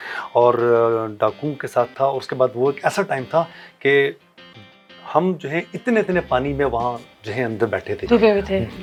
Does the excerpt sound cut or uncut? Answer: uncut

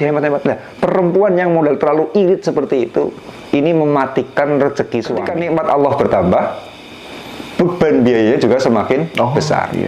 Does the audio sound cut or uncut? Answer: cut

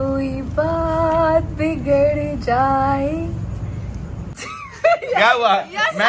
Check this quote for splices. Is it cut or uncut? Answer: uncut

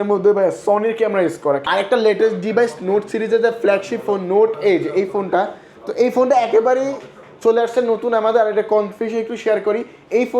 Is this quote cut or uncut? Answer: cut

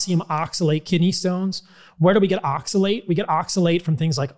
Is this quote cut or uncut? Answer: uncut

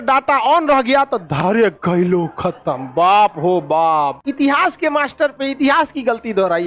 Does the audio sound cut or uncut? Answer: cut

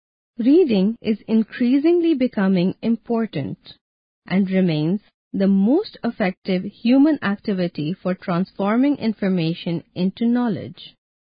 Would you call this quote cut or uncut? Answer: cut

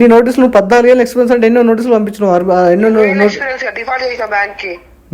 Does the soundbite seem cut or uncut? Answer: uncut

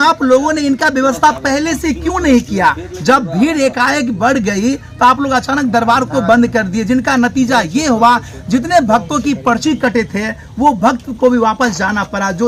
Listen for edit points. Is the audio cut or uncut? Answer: uncut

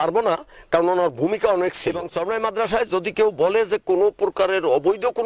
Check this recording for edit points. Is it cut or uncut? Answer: cut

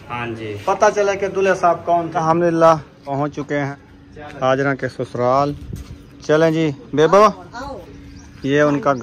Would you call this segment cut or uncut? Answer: cut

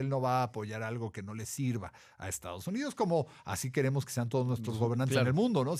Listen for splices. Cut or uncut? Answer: uncut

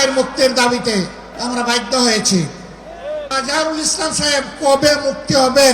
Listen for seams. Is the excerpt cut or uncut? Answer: cut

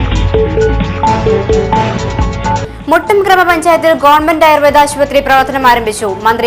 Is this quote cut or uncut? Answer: uncut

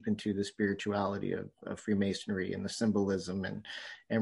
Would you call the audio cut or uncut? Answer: uncut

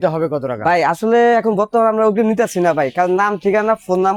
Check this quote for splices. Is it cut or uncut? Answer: uncut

